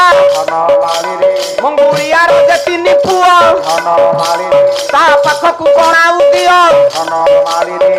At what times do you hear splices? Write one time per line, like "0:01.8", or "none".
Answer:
none